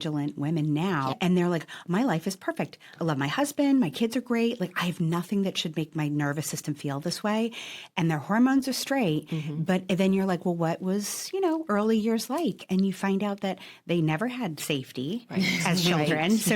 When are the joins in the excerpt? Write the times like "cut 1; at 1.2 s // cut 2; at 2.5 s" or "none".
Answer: cut 1; at 1.1 s // cut 2; at 2.9 s